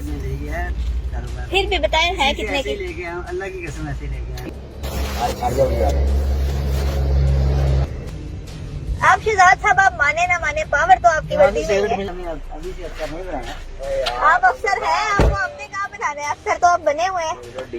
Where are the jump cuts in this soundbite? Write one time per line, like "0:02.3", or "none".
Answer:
0:04.4
0:08.0